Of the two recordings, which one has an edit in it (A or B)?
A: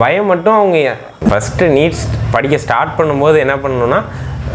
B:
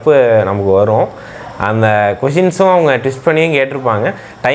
A